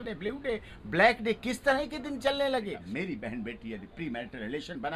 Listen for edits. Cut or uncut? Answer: cut